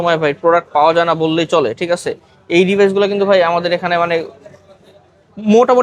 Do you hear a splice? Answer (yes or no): no